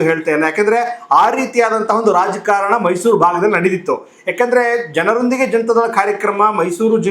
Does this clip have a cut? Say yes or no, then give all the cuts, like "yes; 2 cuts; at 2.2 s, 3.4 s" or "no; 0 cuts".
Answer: no; 0 cuts